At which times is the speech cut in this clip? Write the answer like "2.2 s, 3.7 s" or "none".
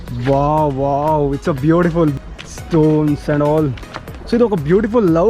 2.1 s